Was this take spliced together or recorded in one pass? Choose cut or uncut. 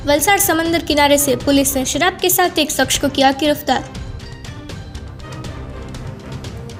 uncut